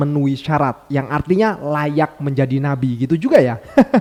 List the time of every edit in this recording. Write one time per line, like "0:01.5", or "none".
none